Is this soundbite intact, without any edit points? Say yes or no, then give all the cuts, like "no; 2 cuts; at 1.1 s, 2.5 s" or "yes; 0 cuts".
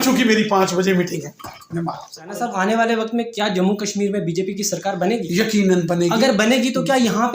no; 1 cut; at 2.3 s